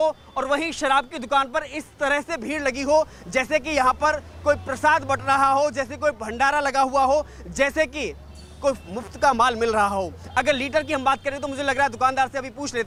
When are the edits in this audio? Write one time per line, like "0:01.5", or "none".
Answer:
none